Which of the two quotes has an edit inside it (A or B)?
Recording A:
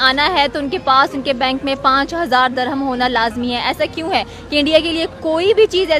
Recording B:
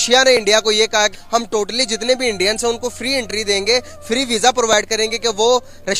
B